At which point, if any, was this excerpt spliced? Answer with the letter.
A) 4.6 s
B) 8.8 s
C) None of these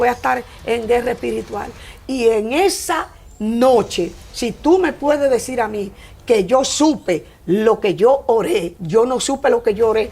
B